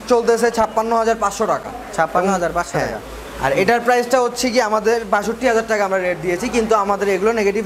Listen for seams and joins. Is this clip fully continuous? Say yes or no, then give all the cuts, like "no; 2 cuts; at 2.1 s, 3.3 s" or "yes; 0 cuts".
yes; 0 cuts